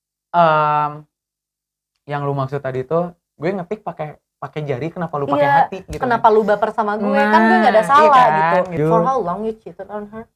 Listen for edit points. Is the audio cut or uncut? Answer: cut